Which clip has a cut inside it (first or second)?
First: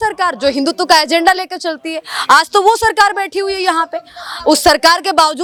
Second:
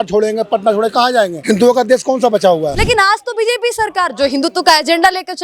second